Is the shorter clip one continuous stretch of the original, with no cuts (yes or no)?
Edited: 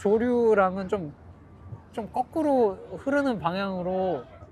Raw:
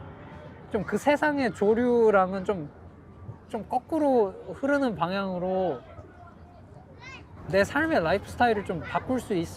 yes